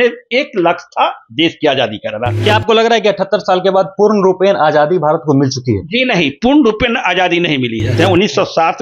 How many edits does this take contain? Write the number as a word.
two